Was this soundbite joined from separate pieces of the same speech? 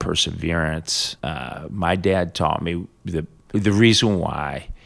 yes; 2 cuts; at 1.0 s, 3.4 s

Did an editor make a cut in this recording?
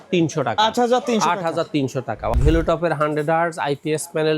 yes; 1 cut; at 2.4 s

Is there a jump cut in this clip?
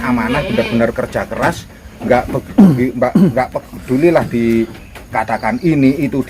no; 0 cuts

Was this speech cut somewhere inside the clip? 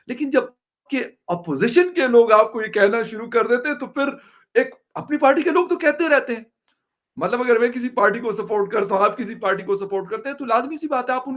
no; 0 cuts

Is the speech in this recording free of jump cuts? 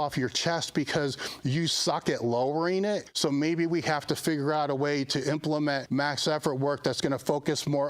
no; 2 cuts; at 3.1 s, 5.8 s

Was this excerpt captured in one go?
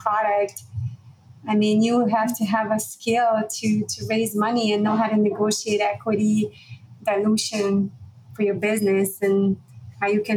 yes; 0 cuts

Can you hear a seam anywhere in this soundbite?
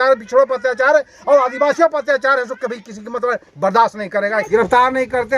yes; 1 cut; at 4.5 s

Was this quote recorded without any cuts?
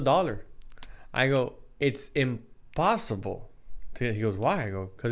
yes; 0 cuts

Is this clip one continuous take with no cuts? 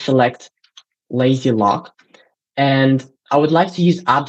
yes; 0 cuts

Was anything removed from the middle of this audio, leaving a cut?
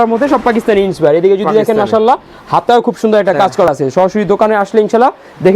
yes; 1 cut; at 3.7 s

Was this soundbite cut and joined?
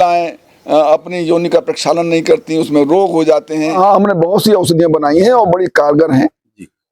yes; 1 cut; at 3.7 s

